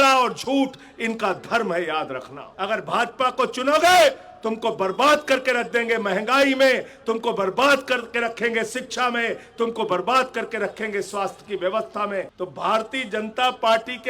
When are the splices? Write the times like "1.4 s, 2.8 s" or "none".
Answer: 2.4 s, 12.3 s